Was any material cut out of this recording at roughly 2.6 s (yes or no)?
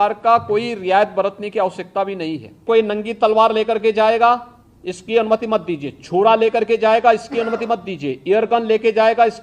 yes